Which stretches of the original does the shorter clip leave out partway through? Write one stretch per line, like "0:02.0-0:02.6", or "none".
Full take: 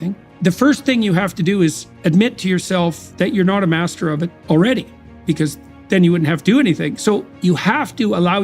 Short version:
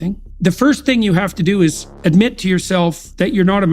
none